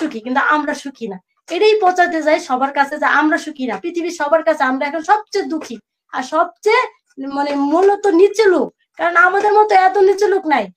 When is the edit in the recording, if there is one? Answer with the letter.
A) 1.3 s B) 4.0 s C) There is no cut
C